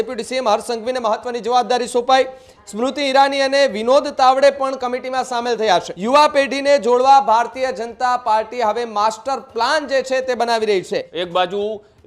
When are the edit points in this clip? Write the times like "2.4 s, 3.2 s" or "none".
5.9 s, 11.1 s